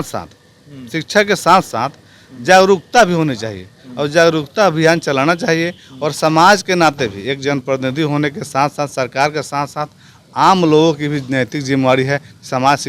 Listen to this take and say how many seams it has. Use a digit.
0